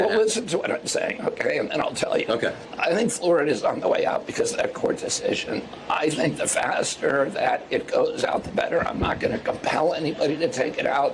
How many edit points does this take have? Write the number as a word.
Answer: one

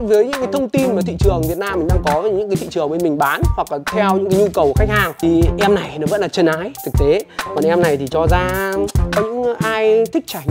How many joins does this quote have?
zero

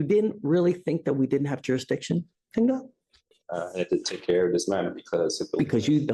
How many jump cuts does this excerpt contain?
zero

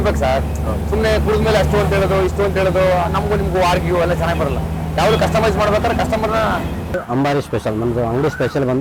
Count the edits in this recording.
one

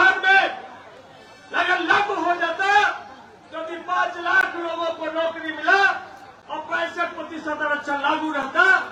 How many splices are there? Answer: zero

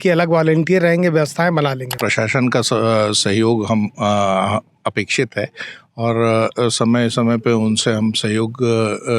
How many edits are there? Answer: one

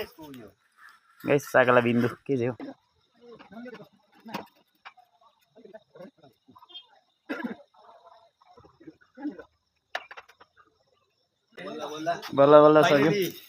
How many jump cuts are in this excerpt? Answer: three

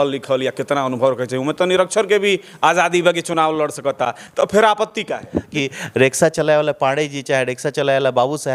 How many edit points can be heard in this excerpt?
one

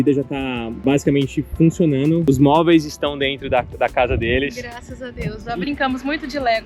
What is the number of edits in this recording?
one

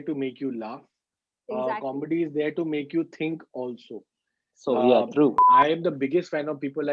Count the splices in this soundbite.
one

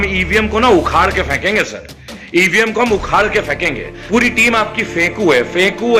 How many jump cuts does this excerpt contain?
one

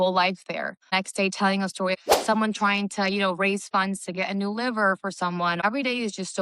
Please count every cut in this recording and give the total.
three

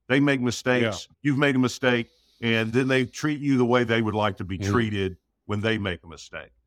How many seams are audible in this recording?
one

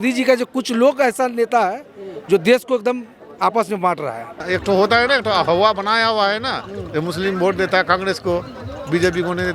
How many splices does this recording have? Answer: one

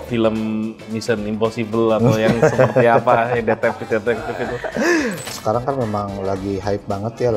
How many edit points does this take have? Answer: one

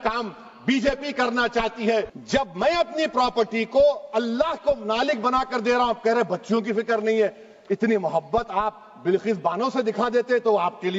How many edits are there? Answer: one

